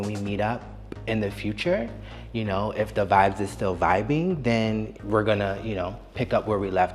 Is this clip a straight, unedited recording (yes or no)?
no